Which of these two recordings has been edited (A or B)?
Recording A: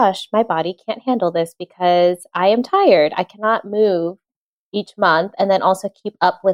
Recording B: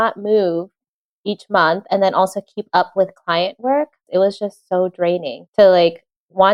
B